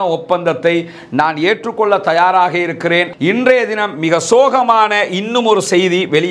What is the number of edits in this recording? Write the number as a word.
one